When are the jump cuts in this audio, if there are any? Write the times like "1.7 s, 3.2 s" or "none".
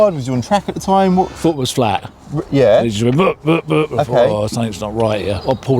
none